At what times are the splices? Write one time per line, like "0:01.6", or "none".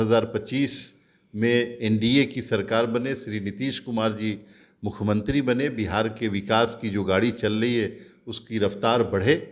none